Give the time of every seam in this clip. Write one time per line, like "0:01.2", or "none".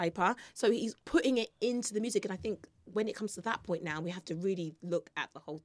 0:01.0